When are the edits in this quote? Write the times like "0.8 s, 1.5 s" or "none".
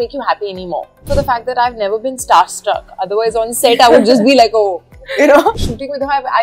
1.1 s, 5.6 s